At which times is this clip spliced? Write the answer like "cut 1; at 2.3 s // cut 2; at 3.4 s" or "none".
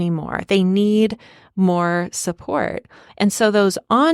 none